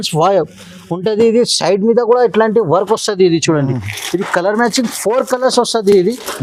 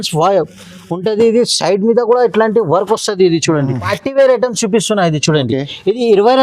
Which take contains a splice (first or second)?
second